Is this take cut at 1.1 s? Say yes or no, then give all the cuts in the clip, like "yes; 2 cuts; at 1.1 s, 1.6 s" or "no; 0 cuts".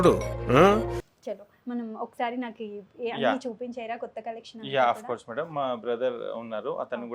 no; 0 cuts